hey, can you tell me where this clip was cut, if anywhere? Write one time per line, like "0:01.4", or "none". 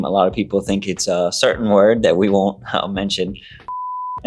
none